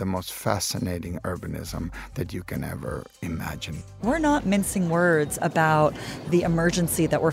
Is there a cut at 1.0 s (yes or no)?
no